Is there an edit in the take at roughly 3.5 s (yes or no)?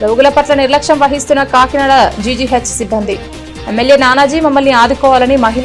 no